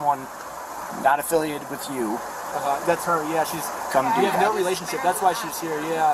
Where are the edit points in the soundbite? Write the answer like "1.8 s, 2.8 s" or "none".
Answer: none

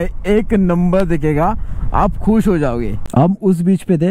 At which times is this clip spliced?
3.0 s

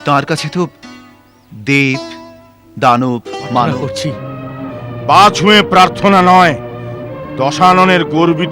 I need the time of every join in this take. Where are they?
3.7 s

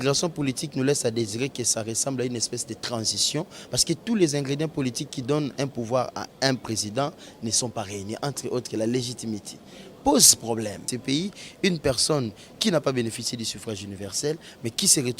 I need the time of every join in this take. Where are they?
10.9 s

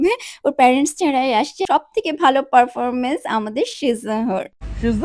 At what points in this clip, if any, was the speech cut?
1.6 s

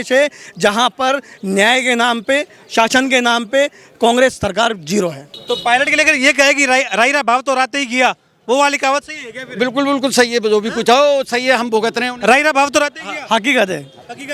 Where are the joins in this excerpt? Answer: 5.3 s

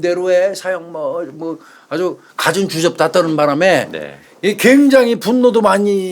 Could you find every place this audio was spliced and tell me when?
none

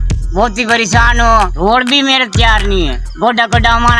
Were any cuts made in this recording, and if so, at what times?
1.5 s, 3.0 s

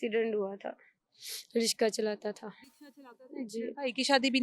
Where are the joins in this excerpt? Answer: none

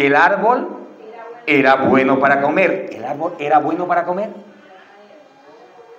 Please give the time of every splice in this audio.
none

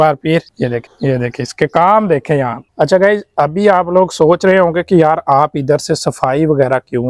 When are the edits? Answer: 2.7 s

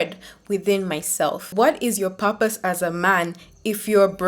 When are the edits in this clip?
1.5 s

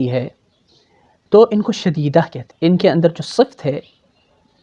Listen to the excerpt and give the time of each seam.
2.4 s

